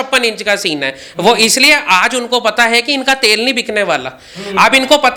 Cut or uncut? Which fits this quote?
uncut